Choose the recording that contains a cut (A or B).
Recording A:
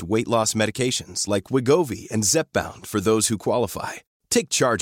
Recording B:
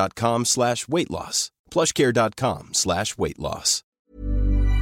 B